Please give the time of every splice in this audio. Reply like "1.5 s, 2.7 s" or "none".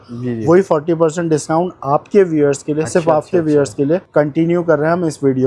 4.1 s